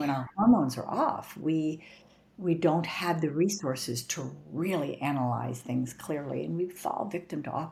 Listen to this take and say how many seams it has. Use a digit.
0